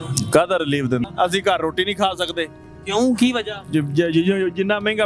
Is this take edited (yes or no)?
yes